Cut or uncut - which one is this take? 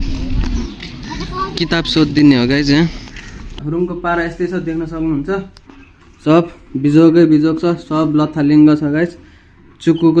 cut